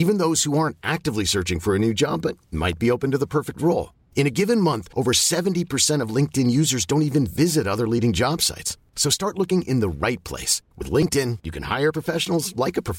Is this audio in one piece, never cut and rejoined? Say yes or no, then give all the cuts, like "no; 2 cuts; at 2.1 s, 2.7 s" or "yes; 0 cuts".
yes; 0 cuts